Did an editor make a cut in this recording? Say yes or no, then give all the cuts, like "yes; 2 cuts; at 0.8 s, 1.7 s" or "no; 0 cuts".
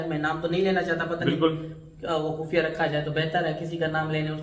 no; 0 cuts